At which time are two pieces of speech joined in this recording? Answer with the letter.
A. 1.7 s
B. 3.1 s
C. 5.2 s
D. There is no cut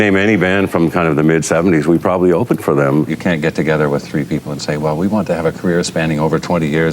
B